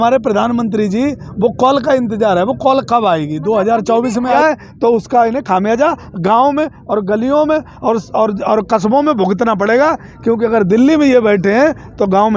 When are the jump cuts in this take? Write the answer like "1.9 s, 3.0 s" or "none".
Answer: 4.4 s